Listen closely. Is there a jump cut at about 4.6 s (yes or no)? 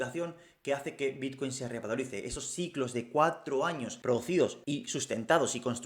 yes